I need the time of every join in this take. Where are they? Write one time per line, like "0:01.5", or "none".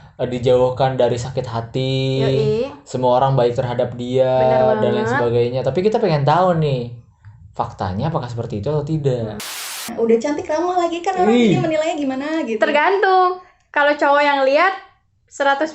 0:09.6